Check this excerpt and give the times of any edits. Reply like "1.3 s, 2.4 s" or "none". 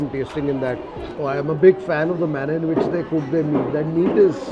1.1 s